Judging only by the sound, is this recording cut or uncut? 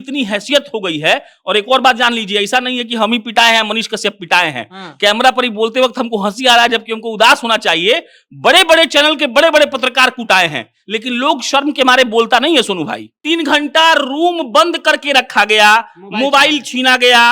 cut